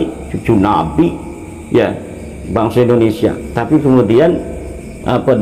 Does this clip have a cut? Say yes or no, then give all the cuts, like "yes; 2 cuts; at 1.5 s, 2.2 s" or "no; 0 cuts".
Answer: no; 0 cuts